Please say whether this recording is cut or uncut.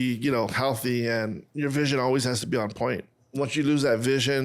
cut